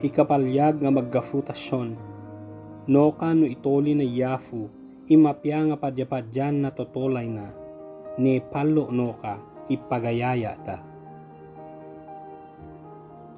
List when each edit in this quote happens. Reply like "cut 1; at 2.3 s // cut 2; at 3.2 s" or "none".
none